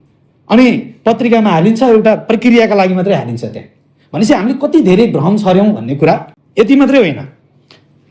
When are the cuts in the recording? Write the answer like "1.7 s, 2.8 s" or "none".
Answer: none

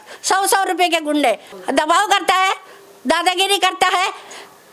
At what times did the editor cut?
1.5 s

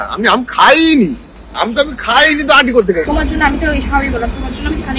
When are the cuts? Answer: 3.1 s

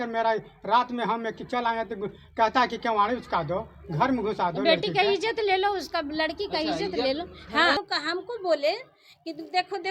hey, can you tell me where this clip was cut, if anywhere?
7.8 s

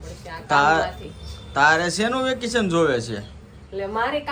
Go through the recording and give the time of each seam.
none

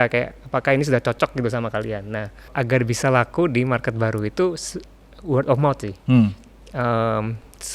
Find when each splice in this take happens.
2.5 s

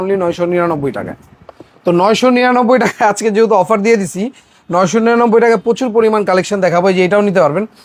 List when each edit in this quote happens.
none

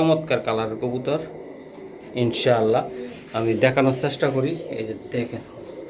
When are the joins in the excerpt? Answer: none

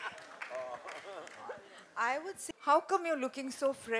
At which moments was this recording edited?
2.6 s

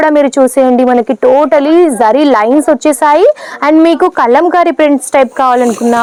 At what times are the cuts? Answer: none

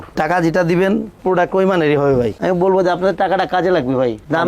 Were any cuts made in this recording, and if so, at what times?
2.4 s

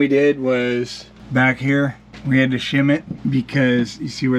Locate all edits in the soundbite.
none

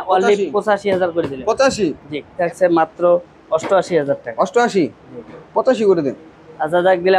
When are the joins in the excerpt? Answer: 2.4 s

